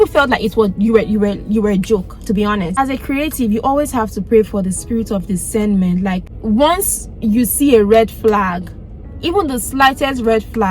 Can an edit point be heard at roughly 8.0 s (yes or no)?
no